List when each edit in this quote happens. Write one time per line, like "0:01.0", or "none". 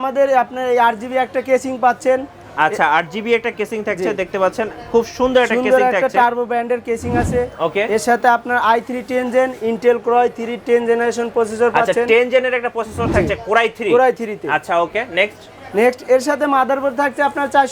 none